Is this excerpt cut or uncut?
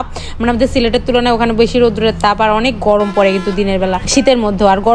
uncut